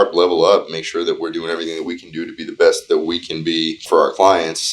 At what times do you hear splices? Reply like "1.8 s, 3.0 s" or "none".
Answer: 3.8 s